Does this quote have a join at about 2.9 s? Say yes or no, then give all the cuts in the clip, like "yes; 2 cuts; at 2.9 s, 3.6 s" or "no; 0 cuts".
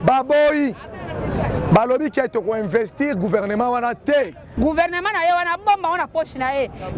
no; 1 cut; at 4.4 s